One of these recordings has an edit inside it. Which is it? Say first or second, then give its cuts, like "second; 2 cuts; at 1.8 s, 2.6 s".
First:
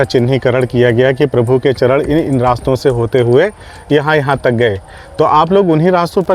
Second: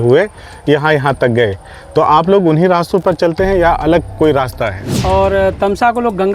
second; 1 cut; at 4.9 s